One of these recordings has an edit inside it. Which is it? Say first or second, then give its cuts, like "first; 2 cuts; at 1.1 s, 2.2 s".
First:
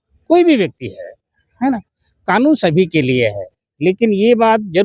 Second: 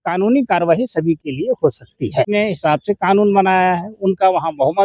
second; 1 cut; at 2.3 s